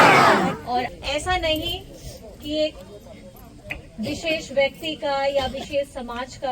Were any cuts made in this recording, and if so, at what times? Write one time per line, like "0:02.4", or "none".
0:00.9